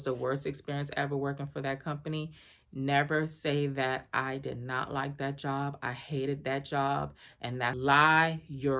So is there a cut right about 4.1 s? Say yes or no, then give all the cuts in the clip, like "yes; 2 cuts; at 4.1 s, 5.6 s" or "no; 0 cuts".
no; 1 cut; at 7.8 s